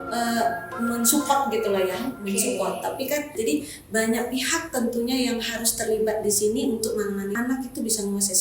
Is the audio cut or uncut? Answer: cut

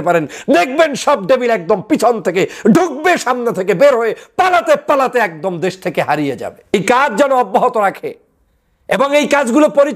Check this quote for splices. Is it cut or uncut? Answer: cut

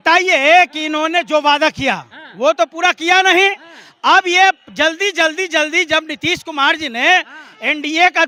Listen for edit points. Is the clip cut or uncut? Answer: uncut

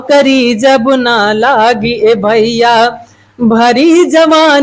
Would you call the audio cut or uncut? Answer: uncut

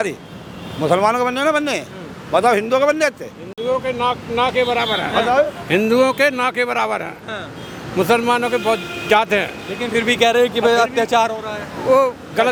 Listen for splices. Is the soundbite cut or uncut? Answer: uncut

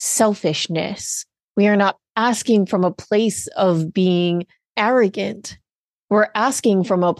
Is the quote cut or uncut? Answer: cut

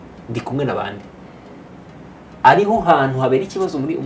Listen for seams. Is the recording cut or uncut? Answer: uncut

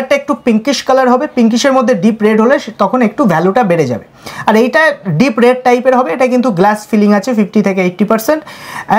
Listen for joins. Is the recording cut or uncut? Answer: uncut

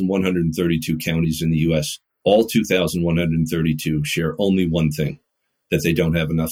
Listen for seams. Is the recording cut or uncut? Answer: cut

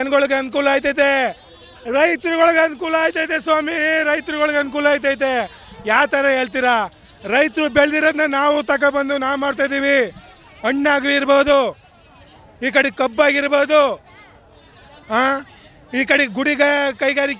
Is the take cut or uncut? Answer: uncut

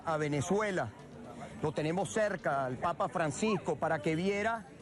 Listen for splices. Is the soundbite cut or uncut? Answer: uncut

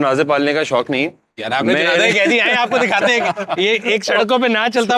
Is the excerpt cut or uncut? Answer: uncut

